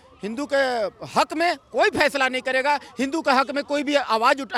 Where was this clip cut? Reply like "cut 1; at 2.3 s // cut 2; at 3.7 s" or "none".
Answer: none